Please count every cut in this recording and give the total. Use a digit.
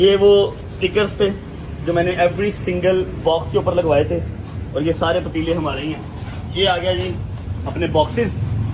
0